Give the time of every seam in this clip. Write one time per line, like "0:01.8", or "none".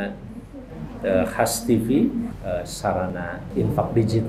0:02.4
0:03.4